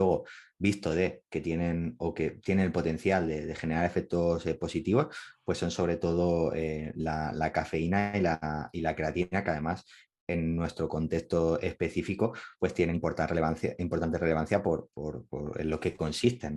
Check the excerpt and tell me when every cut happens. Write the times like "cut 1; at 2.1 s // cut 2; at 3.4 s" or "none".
none